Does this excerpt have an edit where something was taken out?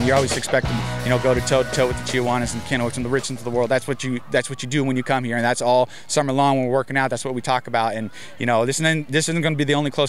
no; 0 cuts

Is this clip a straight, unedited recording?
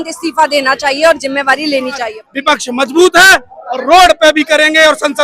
no; 1 cut; at 2.2 s

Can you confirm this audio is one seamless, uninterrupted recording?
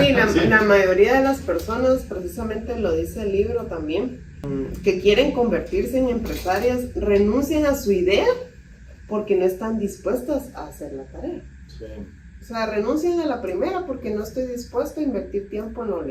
yes; 0 cuts

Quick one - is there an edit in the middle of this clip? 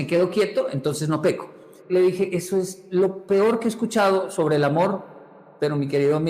yes; 1 cut; at 1.8 s

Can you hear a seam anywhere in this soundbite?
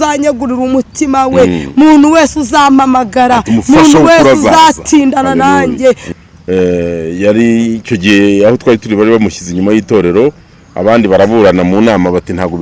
yes; 1 cut; at 6.0 s

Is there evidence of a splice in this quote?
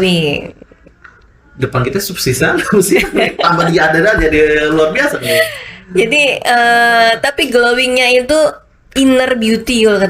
no; 0 cuts

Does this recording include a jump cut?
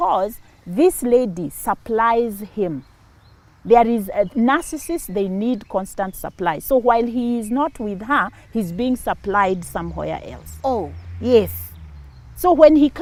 no; 0 cuts

